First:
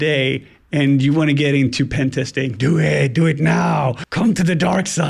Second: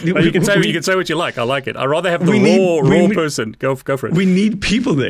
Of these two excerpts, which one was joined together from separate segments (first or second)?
first